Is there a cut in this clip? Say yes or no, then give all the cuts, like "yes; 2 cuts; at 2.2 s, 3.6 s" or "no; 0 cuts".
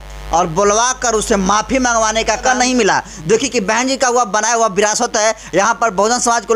yes; 1 cut; at 2.4 s